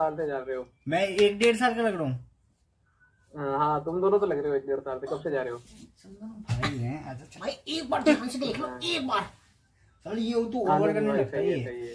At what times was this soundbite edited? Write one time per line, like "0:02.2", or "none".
none